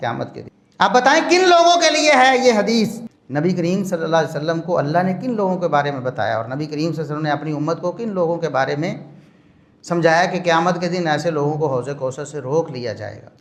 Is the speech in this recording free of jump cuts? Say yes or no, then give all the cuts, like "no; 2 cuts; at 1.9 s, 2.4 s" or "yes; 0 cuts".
yes; 0 cuts